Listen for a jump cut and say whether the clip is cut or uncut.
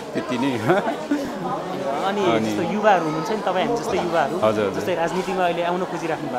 uncut